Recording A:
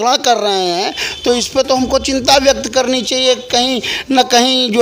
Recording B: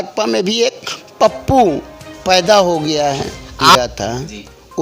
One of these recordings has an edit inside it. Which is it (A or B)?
B